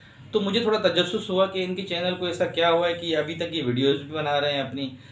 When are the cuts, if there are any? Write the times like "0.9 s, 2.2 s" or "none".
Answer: none